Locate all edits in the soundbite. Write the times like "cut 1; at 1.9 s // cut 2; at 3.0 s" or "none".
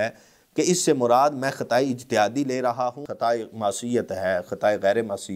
cut 1; at 3.0 s